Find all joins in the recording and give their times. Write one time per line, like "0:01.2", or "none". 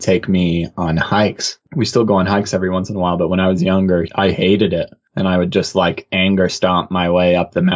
0:01.6